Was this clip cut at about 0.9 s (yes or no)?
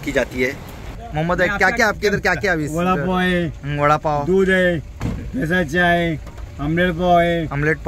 yes